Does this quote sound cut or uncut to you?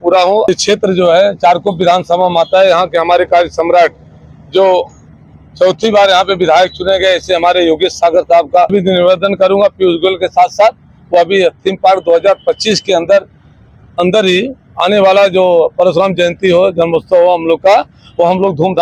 uncut